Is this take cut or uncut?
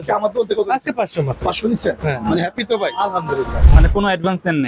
cut